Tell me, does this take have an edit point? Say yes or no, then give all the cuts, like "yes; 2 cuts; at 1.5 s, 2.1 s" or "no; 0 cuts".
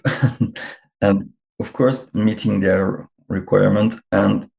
no; 0 cuts